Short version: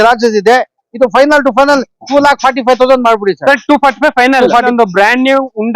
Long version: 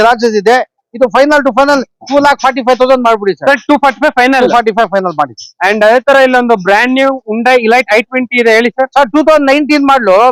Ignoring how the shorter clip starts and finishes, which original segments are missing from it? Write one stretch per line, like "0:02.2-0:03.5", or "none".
0:04.7-0:06.4